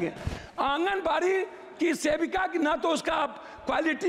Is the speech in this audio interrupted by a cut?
no; 0 cuts

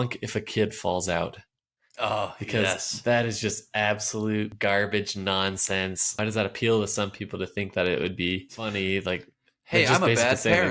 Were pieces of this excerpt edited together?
yes; 3 cuts; at 4.5 s, 6.2 s, 8.6 s

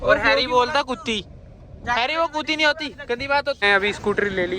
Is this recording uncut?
no; 1 cut; at 3.6 s

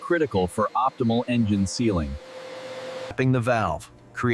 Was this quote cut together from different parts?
yes; 1 cut; at 3.1 s

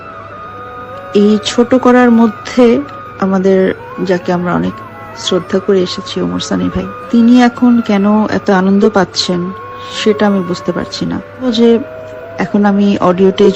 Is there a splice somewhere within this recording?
yes; 4 cuts; at 3.0 s, 3.9 s, 7.0 s, 11.5 s

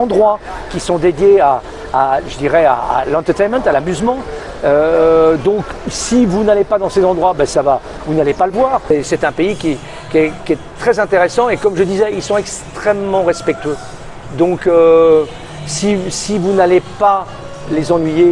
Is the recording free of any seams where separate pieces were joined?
no; 1 cut; at 8.9 s

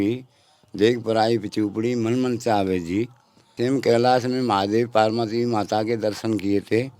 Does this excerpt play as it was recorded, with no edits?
no; 1 cut; at 3.4 s

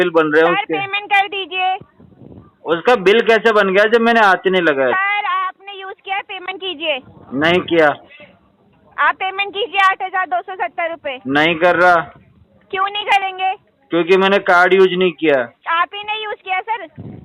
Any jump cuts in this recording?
no; 0 cuts

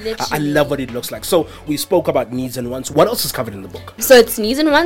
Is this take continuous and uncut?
no; 2 cuts; at 1.6 s, 2.9 s

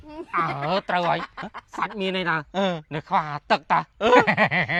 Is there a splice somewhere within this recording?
no; 0 cuts

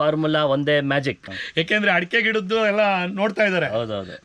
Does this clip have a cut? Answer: yes; 1 cut; at 1.3 s

